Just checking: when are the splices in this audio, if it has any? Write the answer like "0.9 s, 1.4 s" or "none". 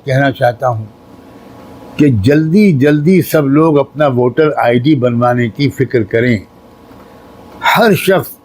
none